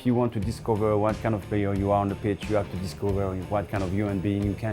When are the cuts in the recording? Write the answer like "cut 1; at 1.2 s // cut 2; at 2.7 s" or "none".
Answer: none